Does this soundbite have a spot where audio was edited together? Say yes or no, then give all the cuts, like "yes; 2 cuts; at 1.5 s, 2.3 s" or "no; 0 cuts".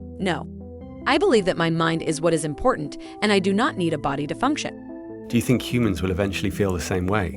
yes; 1 cut; at 1.2 s